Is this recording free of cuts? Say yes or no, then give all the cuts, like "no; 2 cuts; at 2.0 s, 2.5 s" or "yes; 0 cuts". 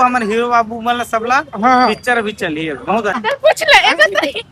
no; 1 cut; at 3.2 s